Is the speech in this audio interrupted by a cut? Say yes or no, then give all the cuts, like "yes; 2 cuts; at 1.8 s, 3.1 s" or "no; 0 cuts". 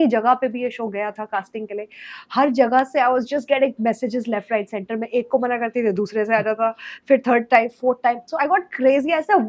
no; 0 cuts